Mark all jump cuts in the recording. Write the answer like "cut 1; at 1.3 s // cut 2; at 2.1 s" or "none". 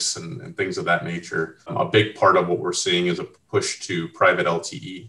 cut 1; at 1.7 s